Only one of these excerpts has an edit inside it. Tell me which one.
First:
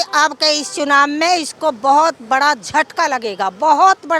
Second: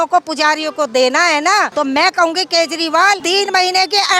second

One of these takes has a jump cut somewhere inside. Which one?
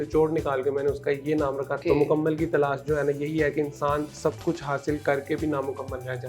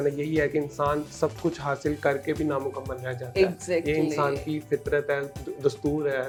first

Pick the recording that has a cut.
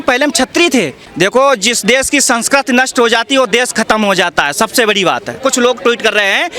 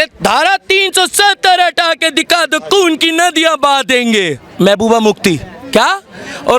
first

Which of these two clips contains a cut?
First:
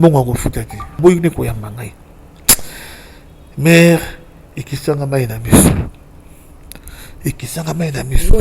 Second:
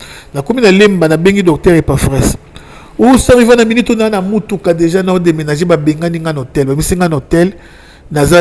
first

